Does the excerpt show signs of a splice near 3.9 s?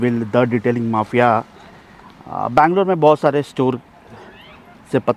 no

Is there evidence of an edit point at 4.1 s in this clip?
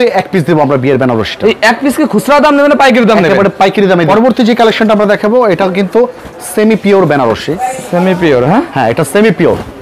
yes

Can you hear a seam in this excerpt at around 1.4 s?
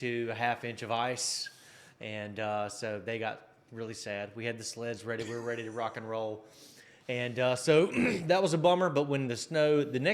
no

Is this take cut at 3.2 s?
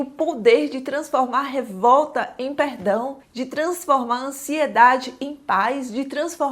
yes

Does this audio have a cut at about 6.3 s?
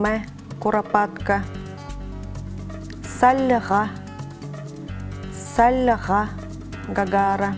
no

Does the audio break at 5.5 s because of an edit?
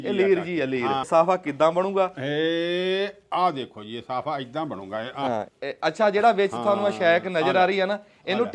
yes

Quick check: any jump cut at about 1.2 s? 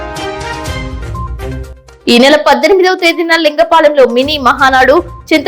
yes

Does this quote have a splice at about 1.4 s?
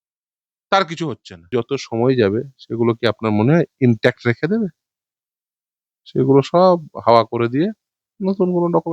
yes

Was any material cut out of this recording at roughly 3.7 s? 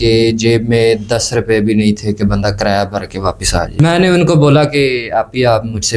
yes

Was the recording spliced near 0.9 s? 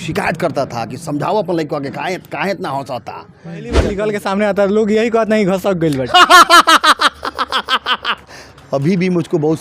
no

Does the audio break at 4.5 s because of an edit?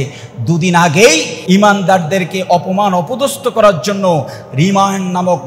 no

